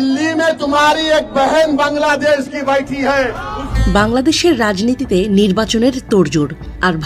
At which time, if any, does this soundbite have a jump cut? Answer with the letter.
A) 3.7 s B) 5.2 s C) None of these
A